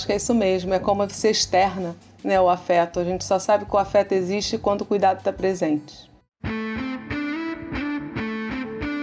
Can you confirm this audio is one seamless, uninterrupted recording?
no; 1 cut; at 6.1 s

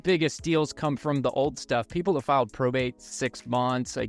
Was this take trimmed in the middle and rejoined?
no; 0 cuts

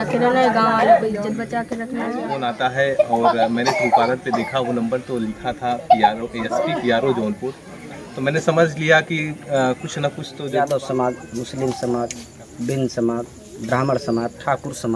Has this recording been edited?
yes; 2 cuts; at 2.3 s, 10.4 s

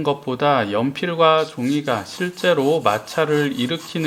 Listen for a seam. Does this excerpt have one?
no; 0 cuts

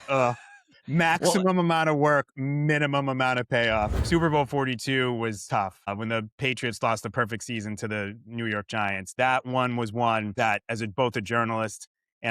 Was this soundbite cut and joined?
yes; 3 cuts; at 4.0 s, 5.9 s, 10.3 s

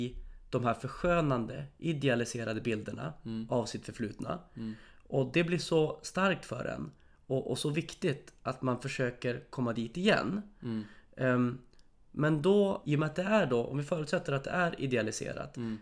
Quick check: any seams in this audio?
no; 0 cuts

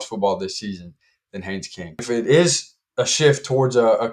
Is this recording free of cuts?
no; 1 cut; at 2.0 s

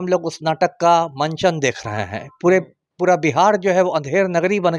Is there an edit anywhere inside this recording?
no; 0 cuts

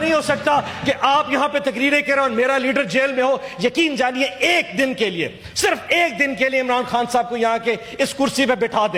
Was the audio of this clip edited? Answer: no; 0 cuts

